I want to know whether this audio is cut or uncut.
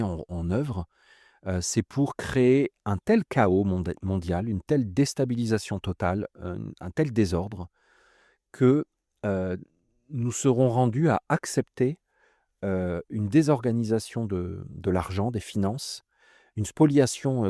uncut